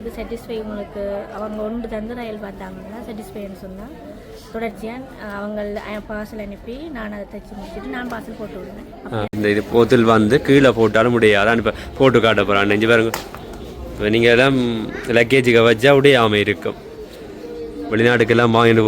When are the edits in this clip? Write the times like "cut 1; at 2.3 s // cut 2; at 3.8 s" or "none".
cut 1; at 9.3 s